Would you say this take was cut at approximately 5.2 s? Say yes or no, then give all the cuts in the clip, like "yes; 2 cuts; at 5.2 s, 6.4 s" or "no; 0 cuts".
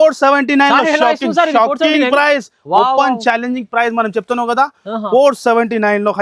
no; 0 cuts